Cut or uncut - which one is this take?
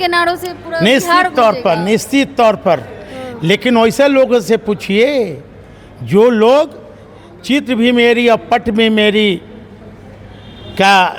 uncut